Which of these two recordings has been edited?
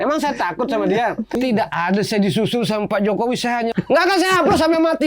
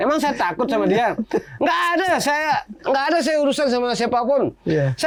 first; 2 cuts; at 1.3 s, 3.7 s

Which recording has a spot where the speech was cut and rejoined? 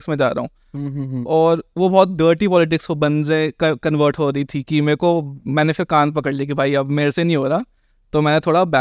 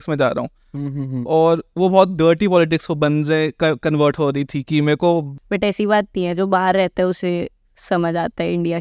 second; 1 cut; at 5.3 s

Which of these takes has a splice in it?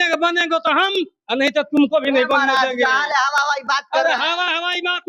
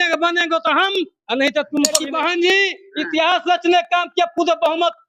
second; 1 cut; at 2.0 s

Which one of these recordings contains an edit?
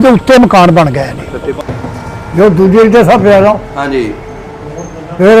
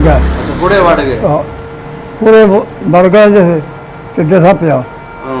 first; 1 cut; at 1.6 s

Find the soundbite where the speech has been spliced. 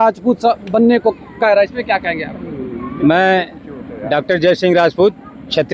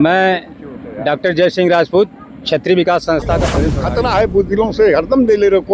second; 1 cut; at 3.6 s

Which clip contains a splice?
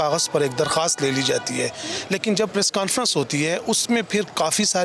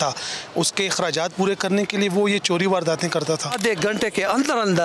second; 1 cut; at 3.6 s

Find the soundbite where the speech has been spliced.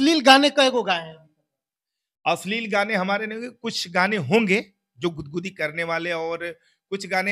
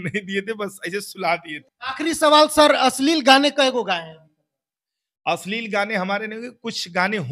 second; 1 cut; at 1.6 s

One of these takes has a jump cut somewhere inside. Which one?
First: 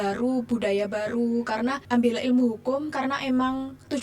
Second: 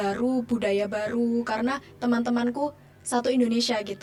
first; 1 cut; at 1.8 s

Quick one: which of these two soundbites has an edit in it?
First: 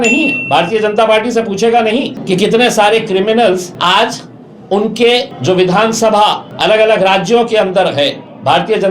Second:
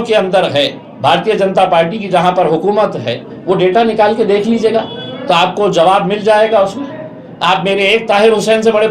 first; 4 cuts; at 2.1 s, 3.7 s, 5.3 s, 6.5 s

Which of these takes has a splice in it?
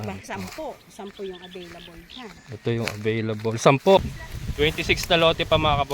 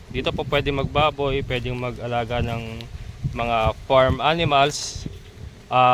first; 1 cut; at 4.0 s

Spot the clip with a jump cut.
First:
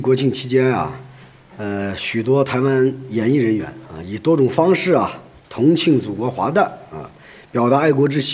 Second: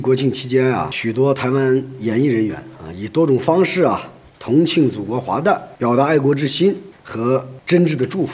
second; 2 cuts; at 0.9 s, 5.7 s

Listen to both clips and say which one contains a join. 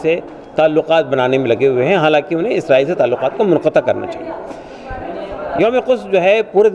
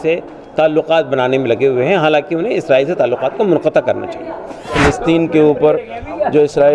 second; 1 cut; at 4.7 s

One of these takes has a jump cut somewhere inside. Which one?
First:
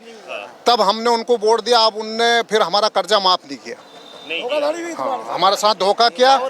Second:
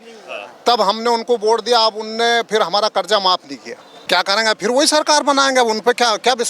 second; 1 cut; at 4.0 s

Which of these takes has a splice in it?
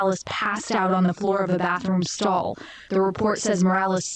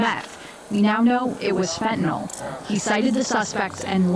second; 1 cut; at 2.3 s

